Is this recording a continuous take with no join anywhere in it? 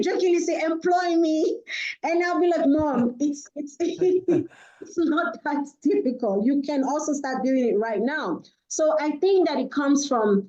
yes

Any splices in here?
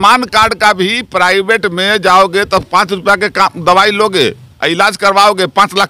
no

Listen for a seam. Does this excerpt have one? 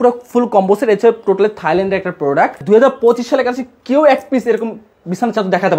yes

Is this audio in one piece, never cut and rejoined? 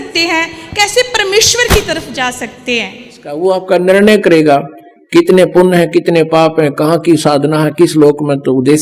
no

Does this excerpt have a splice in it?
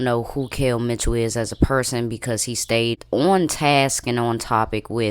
yes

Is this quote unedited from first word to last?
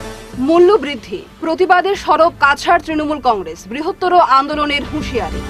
yes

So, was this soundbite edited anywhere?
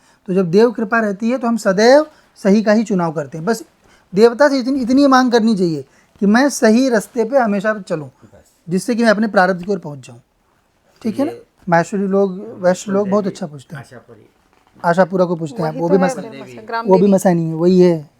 yes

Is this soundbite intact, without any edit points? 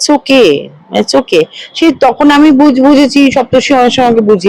yes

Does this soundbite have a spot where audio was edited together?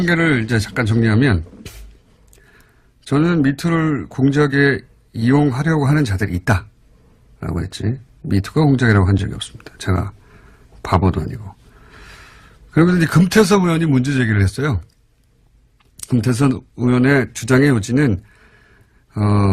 no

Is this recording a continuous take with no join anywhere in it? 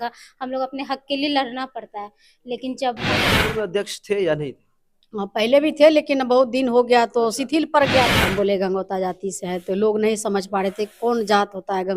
no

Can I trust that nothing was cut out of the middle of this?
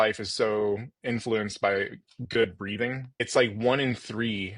no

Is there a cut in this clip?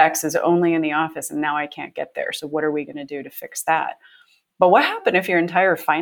yes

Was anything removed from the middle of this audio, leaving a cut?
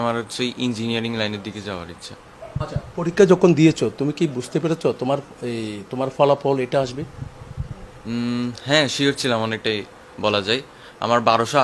no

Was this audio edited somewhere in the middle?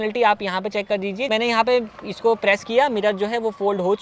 yes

